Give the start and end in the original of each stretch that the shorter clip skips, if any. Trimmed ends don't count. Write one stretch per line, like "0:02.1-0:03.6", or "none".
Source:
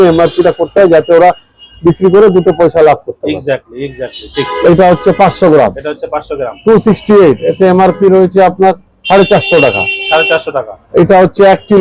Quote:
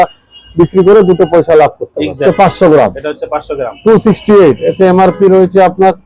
0:03.5-0:05.0